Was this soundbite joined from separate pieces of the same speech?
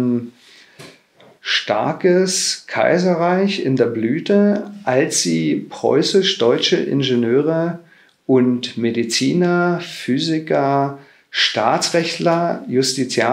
no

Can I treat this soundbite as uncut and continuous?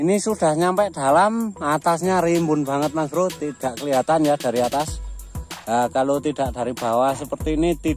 yes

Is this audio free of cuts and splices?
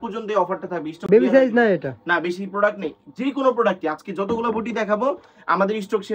yes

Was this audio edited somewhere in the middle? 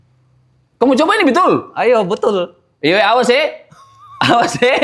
no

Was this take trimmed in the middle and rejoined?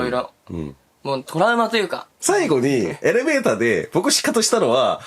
yes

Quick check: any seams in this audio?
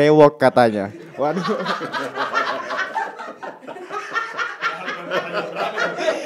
no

